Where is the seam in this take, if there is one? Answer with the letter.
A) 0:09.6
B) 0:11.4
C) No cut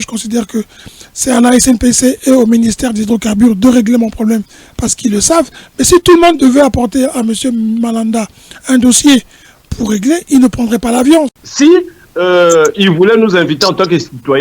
B